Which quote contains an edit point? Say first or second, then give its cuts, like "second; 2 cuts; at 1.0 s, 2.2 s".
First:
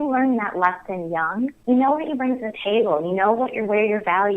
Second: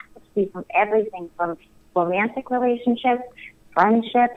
first; 1 cut; at 1.6 s